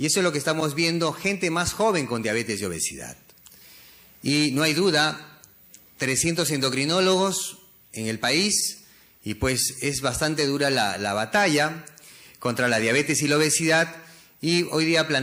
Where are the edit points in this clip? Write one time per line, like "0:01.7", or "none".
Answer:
0:07.6